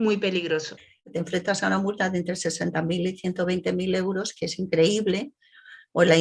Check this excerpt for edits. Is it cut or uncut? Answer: cut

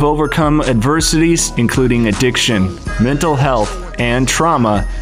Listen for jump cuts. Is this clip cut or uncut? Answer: uncut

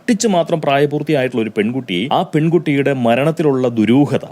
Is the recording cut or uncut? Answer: cut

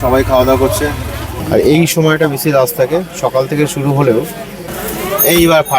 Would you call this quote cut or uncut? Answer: cut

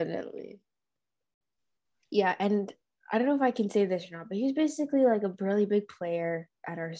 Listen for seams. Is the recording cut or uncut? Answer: cut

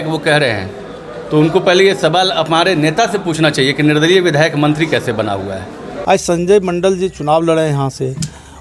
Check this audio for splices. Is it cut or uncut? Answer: cut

